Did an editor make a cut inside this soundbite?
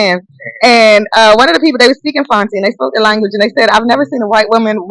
no; 0 cuts

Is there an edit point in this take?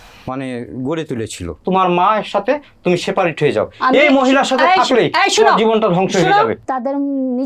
yes; 2 cuts; at 1.6 s, 6.6 s

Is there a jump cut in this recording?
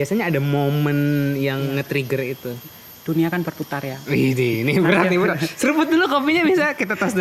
no; 0 cuts

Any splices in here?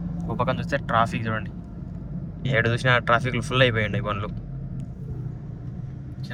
no; 0 cuts

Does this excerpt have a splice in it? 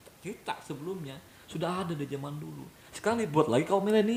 no; 0 cuts

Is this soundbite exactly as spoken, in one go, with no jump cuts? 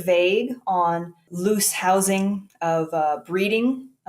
no; 1 cut; at 1.2 s

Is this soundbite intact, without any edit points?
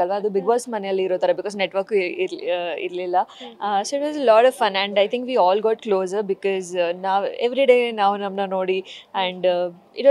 yes; 0 cuts

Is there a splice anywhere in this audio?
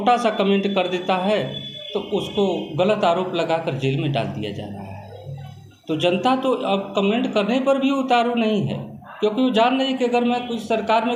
no; 0 cuts

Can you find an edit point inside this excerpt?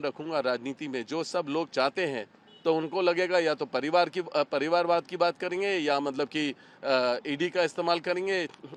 no; 0 cuts

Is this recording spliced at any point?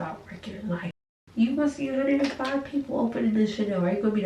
yes; 1 cut; at 0.9 s

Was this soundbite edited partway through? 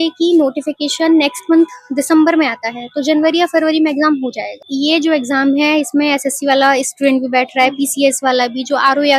yes; 1 cut; at 4.6 s

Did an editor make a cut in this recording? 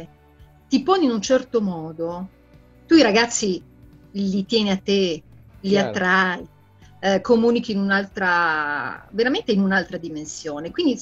no; 0 cuts

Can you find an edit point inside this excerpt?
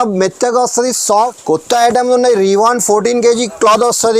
yes; 1 cut; at 1.1 s

